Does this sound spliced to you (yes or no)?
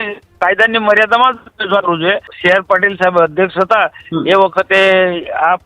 yes